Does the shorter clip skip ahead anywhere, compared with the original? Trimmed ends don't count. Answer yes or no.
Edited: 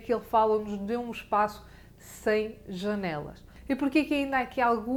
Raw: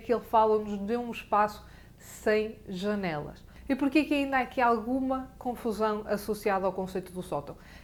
no